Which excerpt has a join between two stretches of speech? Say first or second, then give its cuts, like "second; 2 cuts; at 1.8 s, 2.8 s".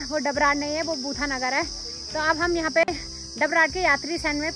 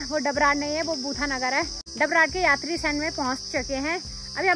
second; 1 cut; at 1.8 s